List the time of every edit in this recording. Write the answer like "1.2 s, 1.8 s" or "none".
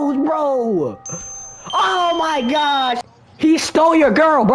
3.0 s